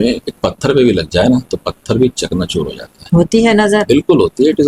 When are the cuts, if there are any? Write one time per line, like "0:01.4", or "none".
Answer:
none